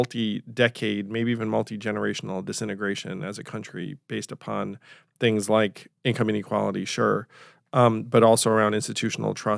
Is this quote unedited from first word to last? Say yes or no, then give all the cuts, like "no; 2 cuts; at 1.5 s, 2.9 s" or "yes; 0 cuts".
no; 1 cut; at 5.9 s